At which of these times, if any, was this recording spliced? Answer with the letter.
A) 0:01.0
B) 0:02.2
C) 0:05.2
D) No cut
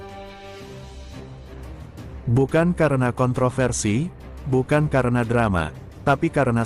B